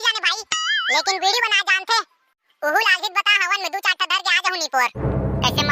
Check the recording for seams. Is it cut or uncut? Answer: uncut